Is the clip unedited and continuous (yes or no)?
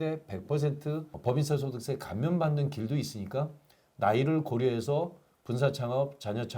no